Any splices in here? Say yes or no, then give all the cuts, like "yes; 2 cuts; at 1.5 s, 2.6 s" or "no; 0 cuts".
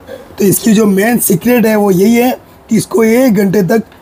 no; 0 cuts